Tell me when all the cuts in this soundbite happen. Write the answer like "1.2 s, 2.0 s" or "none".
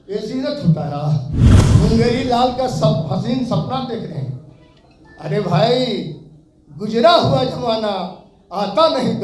1.6 s